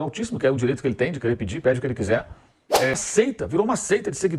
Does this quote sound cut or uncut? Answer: cut